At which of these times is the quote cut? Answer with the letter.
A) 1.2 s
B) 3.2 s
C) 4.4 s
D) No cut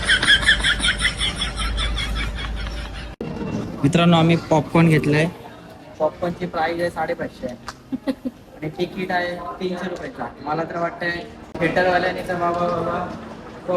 B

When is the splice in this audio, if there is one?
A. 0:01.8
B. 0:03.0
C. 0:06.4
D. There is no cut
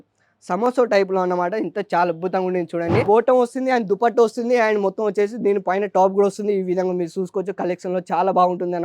B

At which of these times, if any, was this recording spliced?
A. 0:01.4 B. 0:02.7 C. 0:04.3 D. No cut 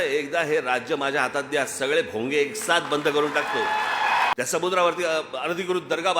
C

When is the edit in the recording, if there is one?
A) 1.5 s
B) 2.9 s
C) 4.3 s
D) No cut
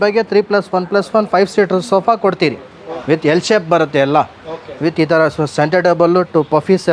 B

